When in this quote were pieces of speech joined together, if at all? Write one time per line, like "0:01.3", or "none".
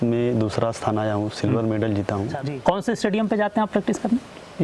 0:02.5